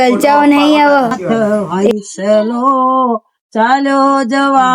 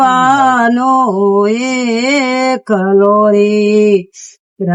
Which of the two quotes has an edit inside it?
first; 1 cut; at 1.2 s

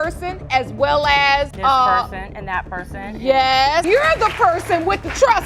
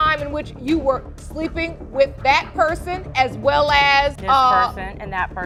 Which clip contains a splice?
first; 1 cut; at 3.8 s

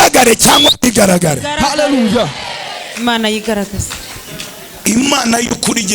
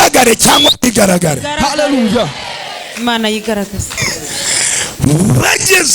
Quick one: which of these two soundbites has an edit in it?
second; 1 cut; at 4.0 s

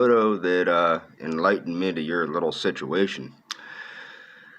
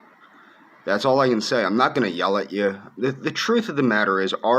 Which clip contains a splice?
second; 1 cut; at 3.6 s

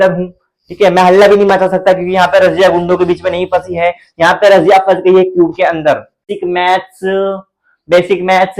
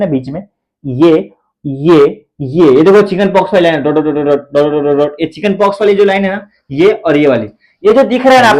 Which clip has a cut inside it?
first; 1 cut; at 6.3 s

